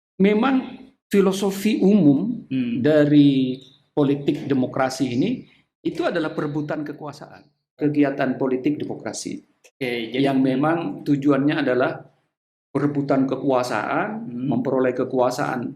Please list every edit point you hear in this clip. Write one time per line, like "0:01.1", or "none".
0:07.8